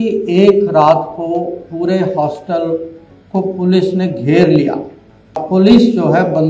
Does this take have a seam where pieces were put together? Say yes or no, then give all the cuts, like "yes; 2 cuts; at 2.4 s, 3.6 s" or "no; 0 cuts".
yes; 1 cut; at 5.4 s